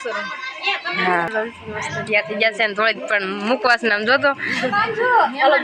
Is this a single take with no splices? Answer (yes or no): no